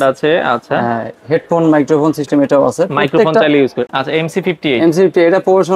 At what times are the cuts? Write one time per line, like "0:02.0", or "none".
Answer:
0:03.8